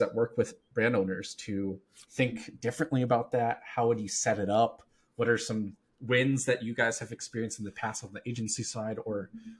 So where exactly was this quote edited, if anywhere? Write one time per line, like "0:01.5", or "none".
none